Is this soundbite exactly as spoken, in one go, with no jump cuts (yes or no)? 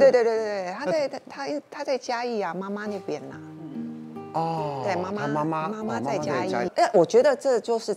no